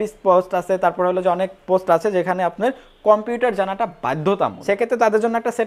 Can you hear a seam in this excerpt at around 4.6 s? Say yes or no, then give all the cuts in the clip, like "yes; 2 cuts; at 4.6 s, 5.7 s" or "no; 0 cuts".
yes; 1 cut; at 4.6 s